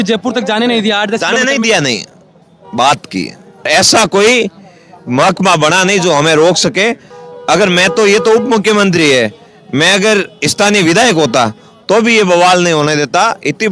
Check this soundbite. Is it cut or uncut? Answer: cut